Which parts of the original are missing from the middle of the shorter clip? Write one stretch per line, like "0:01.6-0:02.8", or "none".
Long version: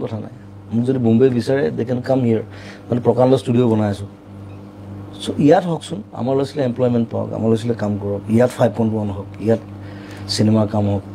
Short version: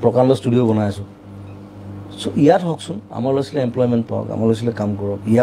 none